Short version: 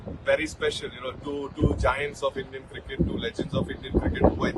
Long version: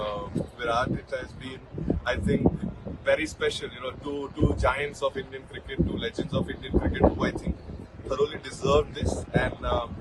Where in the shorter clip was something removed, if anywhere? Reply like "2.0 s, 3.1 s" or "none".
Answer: none